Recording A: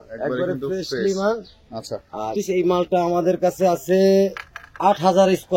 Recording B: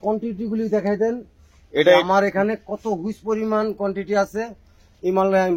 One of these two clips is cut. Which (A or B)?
A